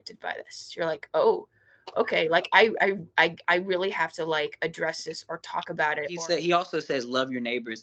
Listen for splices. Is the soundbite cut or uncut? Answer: cut